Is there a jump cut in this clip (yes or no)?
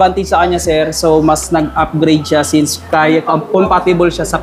no